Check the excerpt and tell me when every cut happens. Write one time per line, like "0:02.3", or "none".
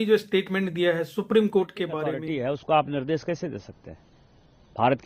0:02.0

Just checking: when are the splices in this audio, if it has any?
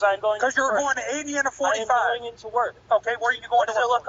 0:02.8

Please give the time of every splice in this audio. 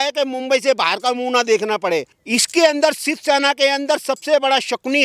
0:02.2

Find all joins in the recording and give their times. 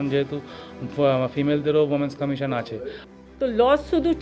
0:02.8

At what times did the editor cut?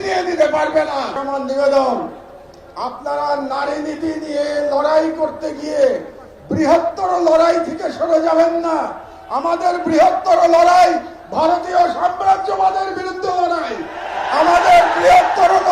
0:01.2

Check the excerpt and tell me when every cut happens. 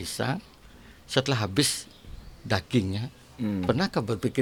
none

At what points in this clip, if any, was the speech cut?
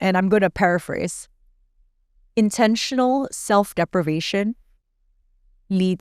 none

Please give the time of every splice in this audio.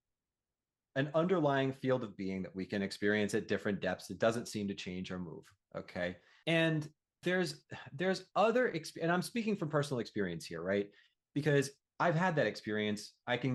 0:06.3
0:07.0

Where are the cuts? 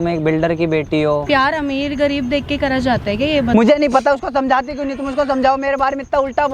0:01.2
0:03.5

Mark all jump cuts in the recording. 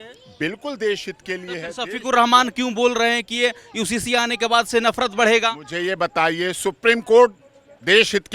none

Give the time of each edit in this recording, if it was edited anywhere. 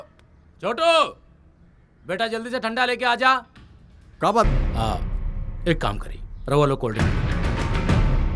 0:04.5

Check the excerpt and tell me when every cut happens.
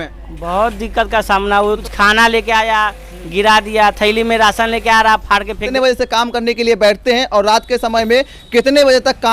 0:01.8
0:05.7

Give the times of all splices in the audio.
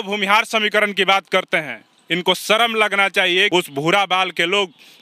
0:03.5

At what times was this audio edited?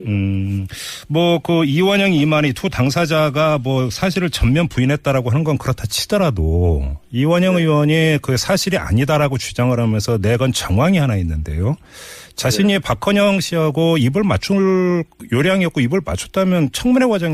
0:02.4

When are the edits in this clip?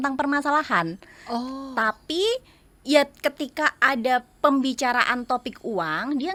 none

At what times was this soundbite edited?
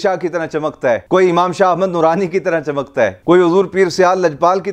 none

